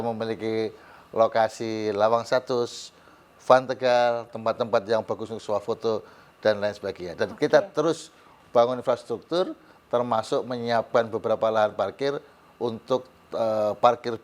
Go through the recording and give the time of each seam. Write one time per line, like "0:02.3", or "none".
none